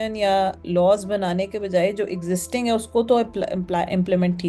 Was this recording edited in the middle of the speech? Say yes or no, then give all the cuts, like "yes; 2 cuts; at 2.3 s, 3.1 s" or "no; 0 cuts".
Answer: no; 0 cuts